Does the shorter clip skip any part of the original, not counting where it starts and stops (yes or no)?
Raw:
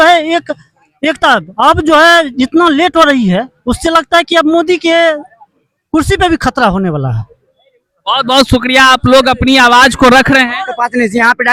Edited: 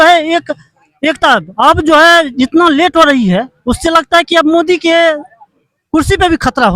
no